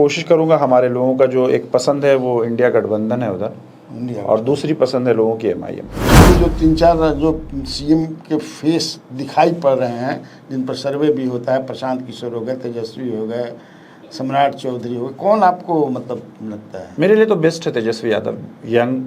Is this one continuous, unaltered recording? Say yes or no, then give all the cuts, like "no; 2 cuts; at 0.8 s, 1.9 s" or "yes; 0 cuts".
no; 1 cut; at 6.2 s